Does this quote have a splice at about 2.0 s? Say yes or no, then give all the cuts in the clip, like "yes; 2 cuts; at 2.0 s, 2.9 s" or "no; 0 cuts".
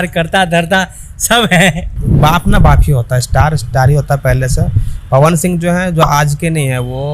yes; 1 cut; at 2.0 s